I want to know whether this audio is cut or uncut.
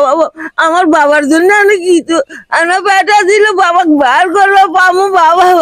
uncut